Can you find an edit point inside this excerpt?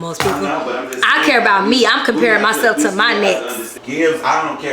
yes; 1 cut; at 3.8 s

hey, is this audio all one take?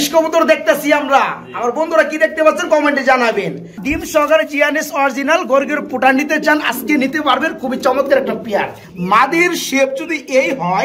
no; 2 cuts; at 3.8 s, 8.8 s

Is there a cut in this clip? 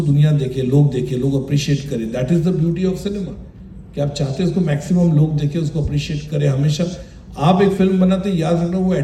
no; 0 cuts

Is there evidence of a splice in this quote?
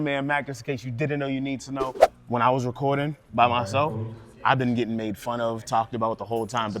yes; 1 cut; at 2.0 s

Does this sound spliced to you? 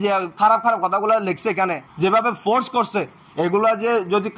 yes; 1 cut; at 1.8 s

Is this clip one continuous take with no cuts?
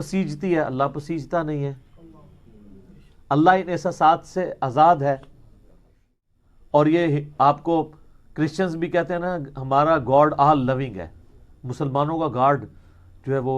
no; 1 cut; at 6.1 s

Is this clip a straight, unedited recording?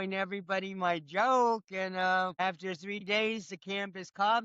no; 1 cut; at 2.4 s

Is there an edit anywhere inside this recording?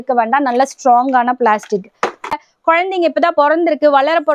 yes; 1 cut; at 2.4 s

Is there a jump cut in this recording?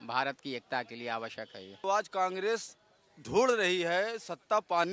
yes; 1 cut; at 1.8 s

